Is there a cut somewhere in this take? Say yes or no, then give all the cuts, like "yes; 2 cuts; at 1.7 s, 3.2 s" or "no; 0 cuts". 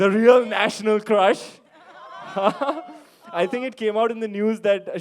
no; 0 cuts